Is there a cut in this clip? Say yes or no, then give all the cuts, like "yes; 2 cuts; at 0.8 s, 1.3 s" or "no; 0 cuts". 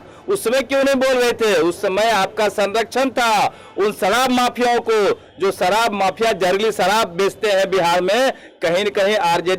no; 0 cuts